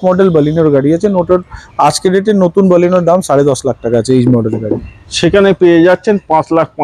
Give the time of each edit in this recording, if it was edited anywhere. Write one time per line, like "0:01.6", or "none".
none